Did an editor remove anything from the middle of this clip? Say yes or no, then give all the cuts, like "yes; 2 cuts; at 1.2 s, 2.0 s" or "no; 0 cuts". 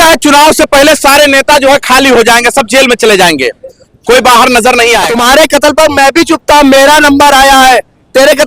yes; 1 cut; at 5.1 s